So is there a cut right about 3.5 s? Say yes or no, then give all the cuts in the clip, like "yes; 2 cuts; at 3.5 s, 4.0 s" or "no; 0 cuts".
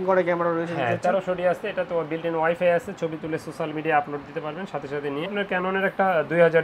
no; 1 cut; at 5.3 s